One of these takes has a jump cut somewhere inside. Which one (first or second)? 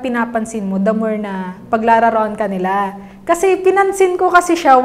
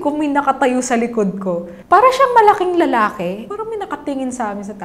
second